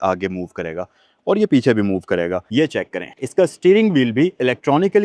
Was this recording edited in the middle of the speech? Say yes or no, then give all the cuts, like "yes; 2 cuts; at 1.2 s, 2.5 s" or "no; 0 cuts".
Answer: yes; 1 cut; at 2.4 s